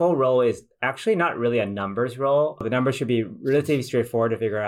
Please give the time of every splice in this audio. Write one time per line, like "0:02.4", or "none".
0:02.6

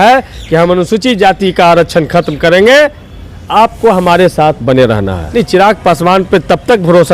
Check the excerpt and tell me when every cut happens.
0:05.2

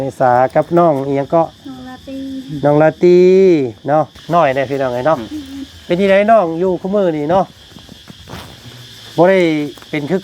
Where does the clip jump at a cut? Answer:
0:04.2

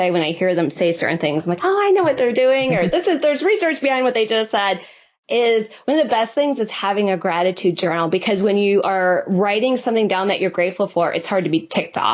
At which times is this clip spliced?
none

